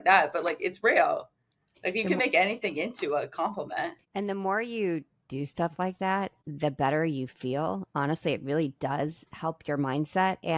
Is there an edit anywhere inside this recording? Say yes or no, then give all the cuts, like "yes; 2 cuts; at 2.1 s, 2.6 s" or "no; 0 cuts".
yes; 2 cuts; at 4.0 s, 6.4 s